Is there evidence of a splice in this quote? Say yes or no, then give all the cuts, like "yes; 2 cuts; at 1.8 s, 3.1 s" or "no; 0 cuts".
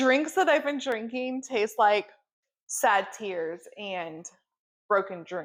no; 0 cuts